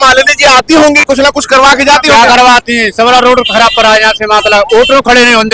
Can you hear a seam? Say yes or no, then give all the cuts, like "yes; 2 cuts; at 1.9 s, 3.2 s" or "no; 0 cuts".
no; 0 cuts